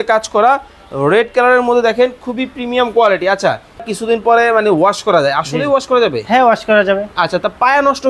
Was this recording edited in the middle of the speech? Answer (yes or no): yes